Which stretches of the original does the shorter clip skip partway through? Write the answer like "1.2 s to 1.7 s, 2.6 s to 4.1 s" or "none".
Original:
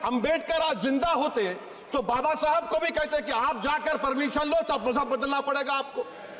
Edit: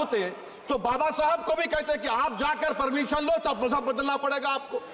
none